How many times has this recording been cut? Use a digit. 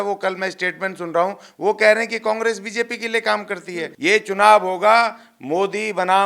1